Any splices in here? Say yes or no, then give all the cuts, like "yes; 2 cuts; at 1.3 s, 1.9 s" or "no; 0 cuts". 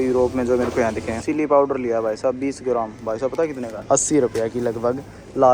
yes; 2 cuts; at 1.2 s, 3.8 s